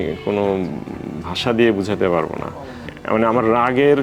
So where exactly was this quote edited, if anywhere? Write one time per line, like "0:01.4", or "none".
0:02.9

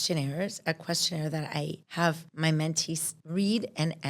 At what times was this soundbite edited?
0:02.1
0:03.1

